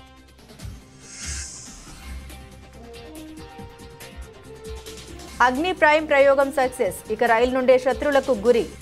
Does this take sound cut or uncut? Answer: cut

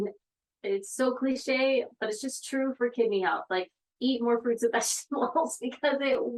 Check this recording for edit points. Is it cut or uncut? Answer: uncut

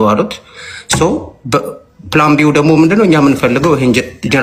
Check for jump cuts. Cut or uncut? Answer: uncut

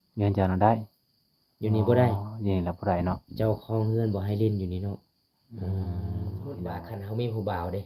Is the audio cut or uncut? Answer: cut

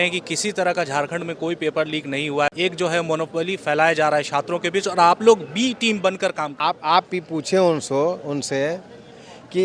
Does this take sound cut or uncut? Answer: cut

